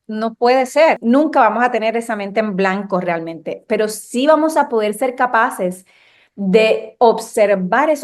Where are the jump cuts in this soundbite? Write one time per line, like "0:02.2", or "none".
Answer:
0:01.0